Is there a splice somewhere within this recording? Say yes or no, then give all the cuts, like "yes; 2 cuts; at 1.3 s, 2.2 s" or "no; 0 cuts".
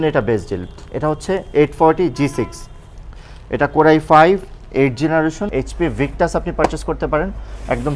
yes; 1 cut; at 5.4 s